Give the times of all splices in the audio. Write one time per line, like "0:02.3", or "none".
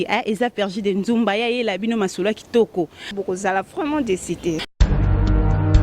0:04.8